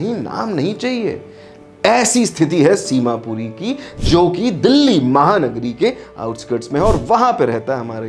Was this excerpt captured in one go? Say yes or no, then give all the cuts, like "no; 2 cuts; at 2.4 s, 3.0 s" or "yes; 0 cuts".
yes; 0 cuts